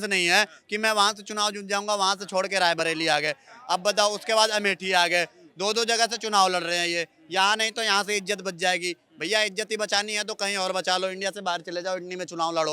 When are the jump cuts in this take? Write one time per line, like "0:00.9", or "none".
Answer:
none